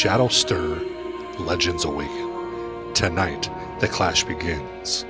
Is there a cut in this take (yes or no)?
no